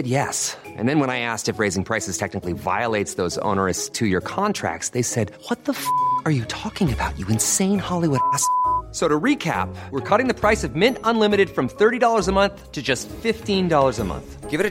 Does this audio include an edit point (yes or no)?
no